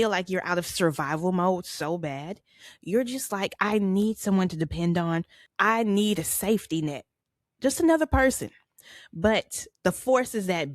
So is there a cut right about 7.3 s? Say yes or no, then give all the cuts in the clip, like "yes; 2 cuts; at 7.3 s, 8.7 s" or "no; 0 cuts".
no; 2 cuts; at 5.4 s, 9.6 s